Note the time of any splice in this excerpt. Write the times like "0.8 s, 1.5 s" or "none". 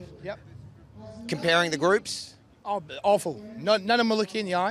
none